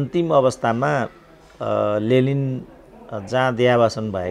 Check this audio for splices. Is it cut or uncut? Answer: uncut